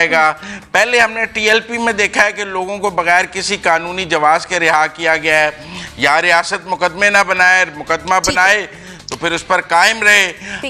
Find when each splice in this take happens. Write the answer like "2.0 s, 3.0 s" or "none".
none